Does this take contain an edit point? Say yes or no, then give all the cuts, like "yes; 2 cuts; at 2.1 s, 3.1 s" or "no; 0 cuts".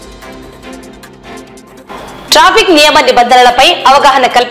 yes; 1 cut; at 1.2 s